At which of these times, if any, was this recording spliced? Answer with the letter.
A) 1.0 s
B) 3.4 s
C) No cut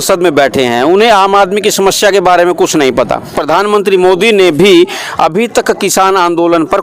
B